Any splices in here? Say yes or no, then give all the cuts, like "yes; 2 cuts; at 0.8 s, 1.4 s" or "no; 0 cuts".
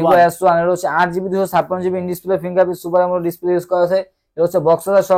no; 0 cuts